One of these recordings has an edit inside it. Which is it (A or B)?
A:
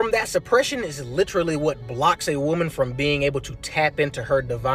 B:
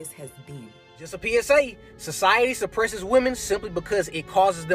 B